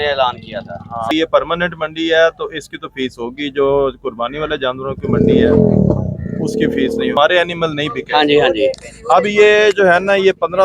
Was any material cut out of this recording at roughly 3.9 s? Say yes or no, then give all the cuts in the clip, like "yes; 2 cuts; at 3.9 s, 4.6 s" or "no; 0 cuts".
no; 2 cuts; at 1.1 s, 7.1 s